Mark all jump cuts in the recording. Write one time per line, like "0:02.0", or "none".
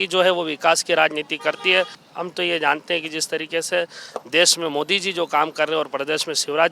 0:02.0